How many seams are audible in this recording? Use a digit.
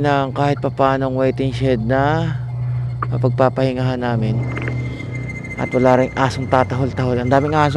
0